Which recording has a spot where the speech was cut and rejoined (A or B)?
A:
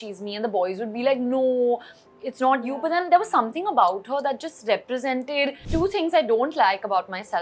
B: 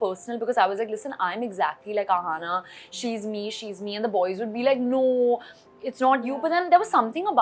A